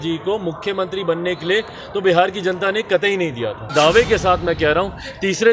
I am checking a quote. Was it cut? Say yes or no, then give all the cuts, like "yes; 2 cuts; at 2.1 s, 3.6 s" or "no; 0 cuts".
yes; 1 cut; at 3.7 s